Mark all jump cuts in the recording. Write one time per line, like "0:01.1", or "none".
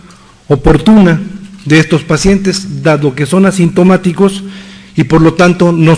0:02.2